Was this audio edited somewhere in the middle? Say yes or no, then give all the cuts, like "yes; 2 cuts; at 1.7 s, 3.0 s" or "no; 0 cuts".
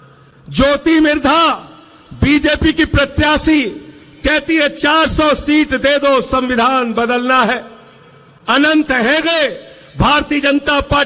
no; 0 cuts